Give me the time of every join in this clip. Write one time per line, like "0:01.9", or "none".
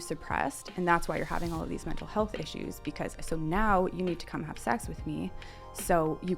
none